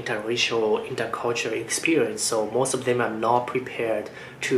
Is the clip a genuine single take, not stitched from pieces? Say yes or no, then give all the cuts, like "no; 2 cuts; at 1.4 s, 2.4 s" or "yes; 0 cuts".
yes; 0 cuts